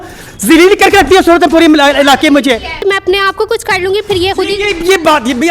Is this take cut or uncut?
cut